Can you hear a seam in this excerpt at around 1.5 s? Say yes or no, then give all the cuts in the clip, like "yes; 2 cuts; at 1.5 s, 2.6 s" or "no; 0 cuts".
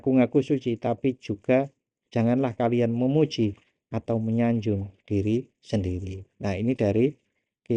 no; 0 cuts